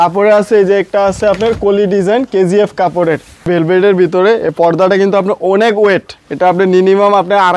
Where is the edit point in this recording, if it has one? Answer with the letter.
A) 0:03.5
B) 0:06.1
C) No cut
A